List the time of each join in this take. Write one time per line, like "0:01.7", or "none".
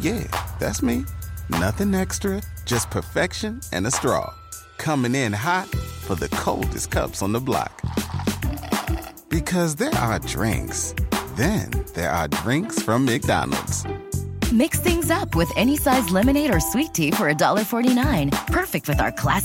none